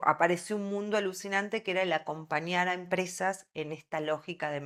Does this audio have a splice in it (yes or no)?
no